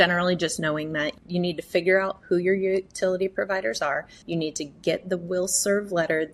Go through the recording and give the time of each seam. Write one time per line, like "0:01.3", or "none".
0:01.2
0:04.1